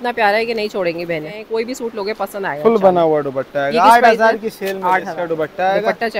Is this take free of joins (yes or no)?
no